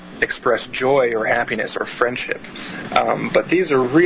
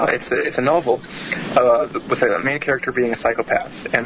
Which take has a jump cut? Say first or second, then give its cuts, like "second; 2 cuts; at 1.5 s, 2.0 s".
second; 1 cut; at 3.1 s